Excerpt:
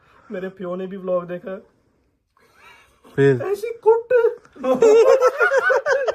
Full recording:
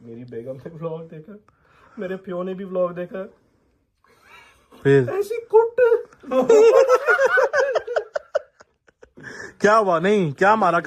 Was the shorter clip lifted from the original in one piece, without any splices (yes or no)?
yes